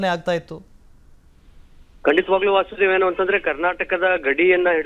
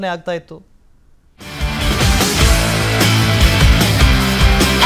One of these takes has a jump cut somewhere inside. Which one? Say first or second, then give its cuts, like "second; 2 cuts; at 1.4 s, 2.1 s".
first; 1 cut; at 1.3 s